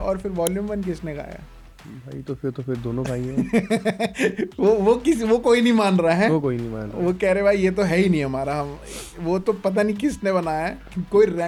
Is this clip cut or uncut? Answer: uncut